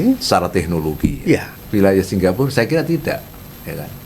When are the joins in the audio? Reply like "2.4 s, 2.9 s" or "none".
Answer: 1.5 s

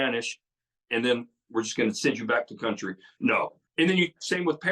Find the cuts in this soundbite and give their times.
3.6 s

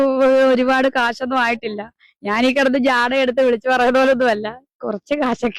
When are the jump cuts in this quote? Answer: none

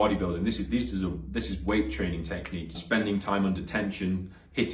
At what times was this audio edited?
2.8 s

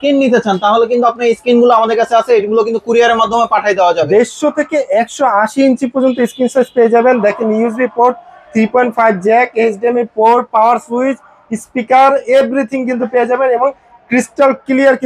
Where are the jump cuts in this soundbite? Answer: 4.1 s

